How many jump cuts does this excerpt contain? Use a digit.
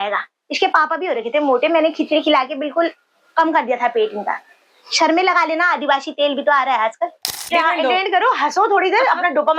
1